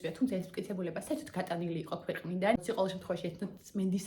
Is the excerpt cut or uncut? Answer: cut